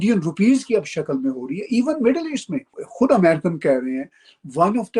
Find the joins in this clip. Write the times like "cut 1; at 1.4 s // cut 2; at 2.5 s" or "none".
cut 1; at 2.8 s